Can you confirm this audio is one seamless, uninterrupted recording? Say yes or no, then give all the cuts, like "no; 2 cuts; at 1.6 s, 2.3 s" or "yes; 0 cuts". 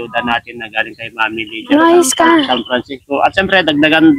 yes; 0 cuts